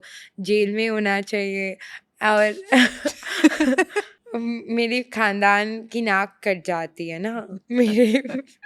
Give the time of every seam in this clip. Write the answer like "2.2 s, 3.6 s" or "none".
4.2 s